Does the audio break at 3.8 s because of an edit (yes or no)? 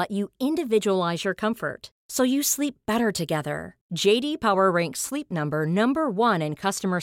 no